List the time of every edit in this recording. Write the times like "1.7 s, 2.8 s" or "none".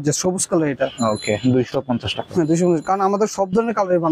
none